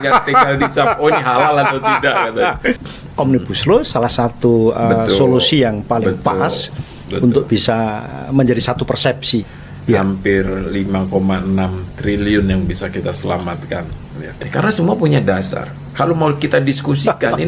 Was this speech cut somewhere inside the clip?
yes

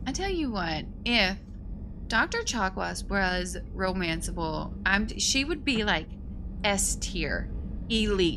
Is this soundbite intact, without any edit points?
yes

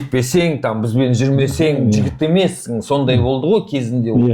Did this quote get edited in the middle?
no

